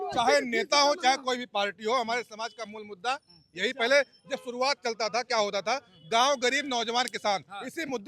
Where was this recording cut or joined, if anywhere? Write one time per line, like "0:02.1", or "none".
none